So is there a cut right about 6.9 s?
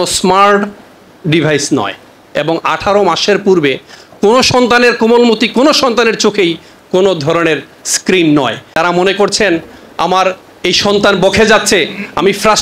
no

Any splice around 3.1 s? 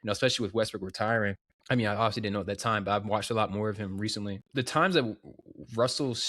no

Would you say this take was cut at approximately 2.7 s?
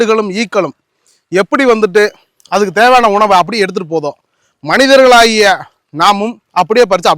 no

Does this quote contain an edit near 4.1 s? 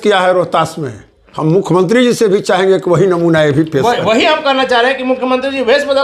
no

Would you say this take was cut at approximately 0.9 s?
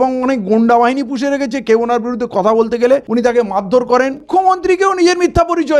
no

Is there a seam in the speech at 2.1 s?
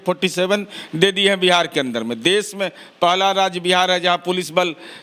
no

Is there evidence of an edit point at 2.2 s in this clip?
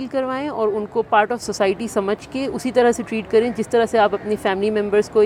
no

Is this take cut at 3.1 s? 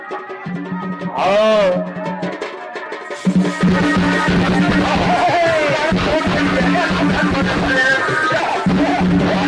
no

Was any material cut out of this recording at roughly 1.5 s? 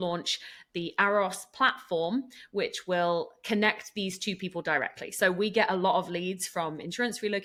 no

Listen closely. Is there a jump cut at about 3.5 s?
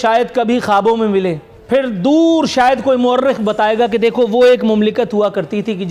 no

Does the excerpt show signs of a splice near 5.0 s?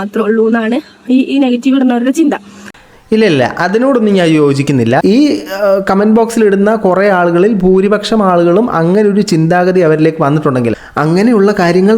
yes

